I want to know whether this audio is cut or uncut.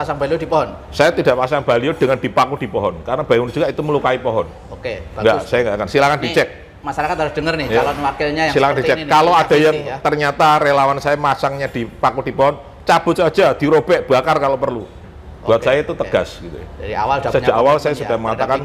uncut